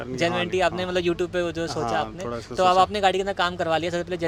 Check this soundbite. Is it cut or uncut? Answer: uncut